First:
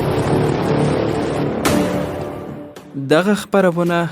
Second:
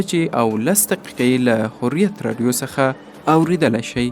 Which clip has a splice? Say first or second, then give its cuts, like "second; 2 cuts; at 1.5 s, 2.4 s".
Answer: first; 1 cut; at 2.0 s